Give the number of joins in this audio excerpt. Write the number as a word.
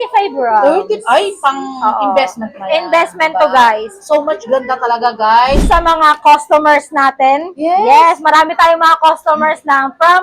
one